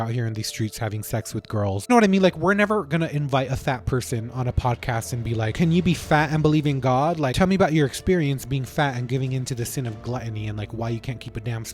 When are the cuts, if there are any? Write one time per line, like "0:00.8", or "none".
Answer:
0:01.9
0:05.5
0:07.3